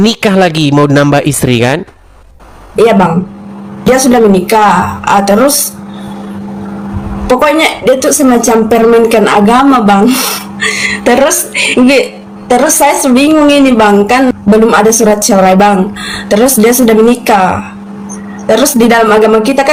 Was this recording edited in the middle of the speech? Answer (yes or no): no